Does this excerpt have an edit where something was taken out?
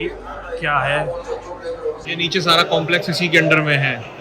yes; 1 cut; at 2.0 s

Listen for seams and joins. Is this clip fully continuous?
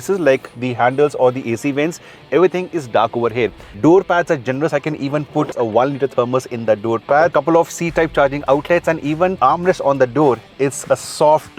no; 4 cuts; at 3.6 s, 5.5 s, 7.3 s, 9.4 s

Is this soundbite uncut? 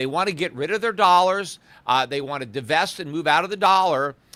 yes; 0 cuts

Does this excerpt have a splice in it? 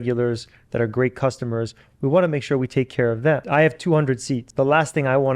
yes; 2 cuts; at 3.4 s, 4.5 s

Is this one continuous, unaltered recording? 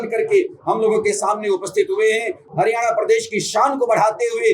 yes; 0 cuts

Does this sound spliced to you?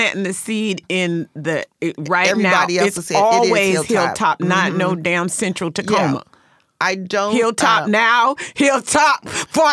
no; 0 cuts

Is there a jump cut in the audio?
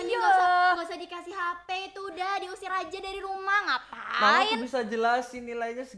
no; 0 cuts

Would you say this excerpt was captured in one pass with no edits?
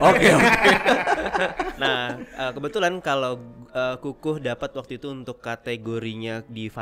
yes; 0 cuts

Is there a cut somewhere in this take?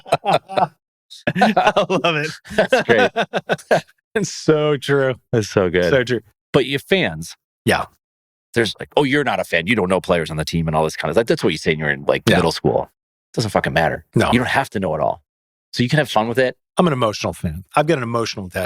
yes; 1 cut; at 6.3 s

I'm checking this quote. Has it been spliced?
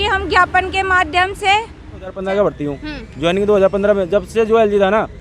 yes; 1 cut; at 2.2 s

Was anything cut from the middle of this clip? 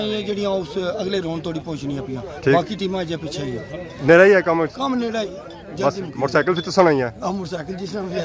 no; 0 cuts

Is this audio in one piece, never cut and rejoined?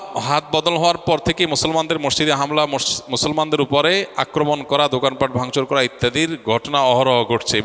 yes; 0 cuts

